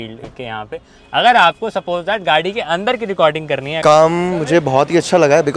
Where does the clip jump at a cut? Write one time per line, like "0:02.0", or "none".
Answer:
0:03.8

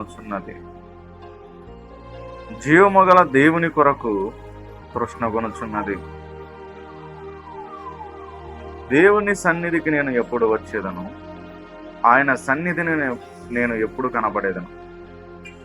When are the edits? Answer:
none

